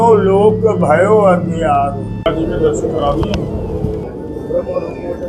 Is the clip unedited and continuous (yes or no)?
no